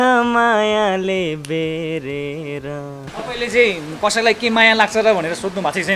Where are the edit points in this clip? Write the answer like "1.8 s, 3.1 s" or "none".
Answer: 3.1 s